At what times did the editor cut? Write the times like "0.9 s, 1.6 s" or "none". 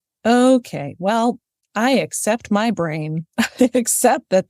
none